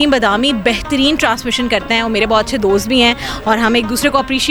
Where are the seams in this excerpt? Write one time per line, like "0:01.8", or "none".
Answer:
none